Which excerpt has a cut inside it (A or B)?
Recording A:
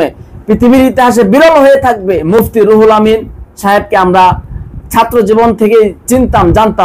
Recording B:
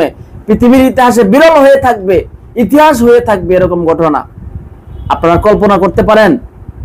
A